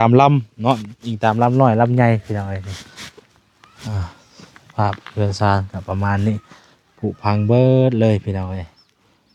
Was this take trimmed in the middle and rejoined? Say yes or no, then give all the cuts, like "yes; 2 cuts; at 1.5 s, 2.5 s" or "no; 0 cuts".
no; 0 cuts